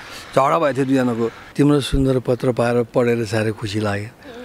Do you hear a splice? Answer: yes; 1 cut; at 1.4 s

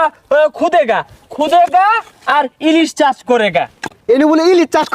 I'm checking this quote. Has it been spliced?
yes; 1 cut; at 3.9 s

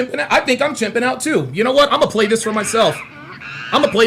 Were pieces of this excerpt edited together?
no; 0 cuts

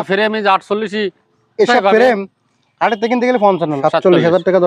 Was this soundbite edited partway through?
yes; 1 cut; at 3.8 s

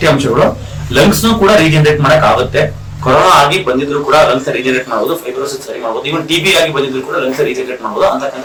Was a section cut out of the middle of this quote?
no; 0 cuts

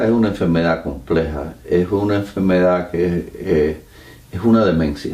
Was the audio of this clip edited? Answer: yes; 1 cut; at 1.0 s

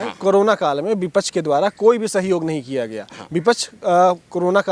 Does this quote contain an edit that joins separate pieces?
no; 0 cuts

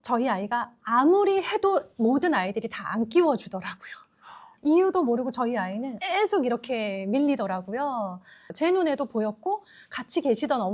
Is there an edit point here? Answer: yes; 2 cuts; at 4.4 s, 8.4 s

